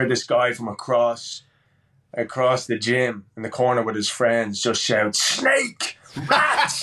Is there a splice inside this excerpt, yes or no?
no